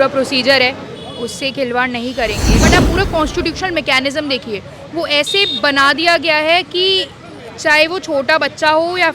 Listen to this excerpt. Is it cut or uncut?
cut